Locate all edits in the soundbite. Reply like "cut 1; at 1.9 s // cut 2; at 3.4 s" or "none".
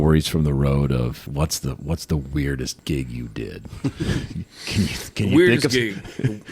cut 1; at 1.2 s // cut 2; at 2.8 s